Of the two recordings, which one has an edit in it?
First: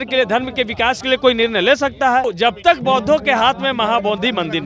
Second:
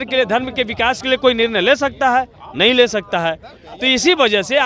first; 1 cut; at 2.3 s

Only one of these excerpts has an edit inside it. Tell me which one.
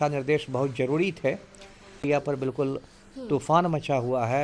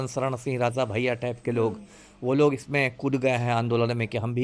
first; 1 cut; at 2.0 s

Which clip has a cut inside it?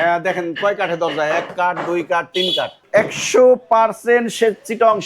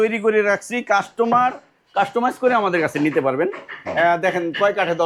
first; 1 cut; at 2.8 s

